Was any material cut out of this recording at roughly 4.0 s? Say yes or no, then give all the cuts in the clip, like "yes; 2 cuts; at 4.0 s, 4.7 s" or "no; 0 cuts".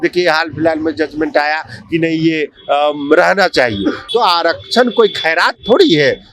yes; 1 cut; at 4.0 s